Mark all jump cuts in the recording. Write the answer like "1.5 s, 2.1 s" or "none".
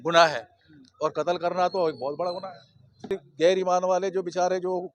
3.2 s